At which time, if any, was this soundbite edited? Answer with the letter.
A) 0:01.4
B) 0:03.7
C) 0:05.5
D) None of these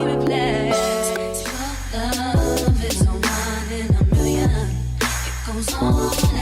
A